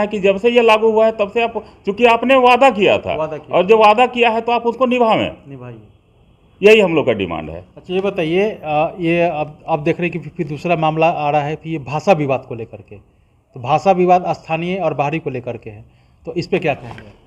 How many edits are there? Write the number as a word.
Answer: zero